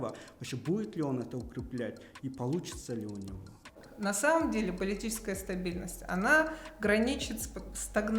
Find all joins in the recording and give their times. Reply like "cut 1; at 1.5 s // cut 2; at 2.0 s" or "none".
cut 1; at 3.8 s